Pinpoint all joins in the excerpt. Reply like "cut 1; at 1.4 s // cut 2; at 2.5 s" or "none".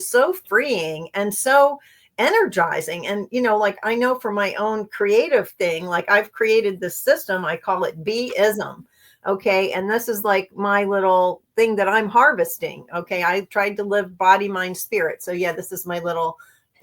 none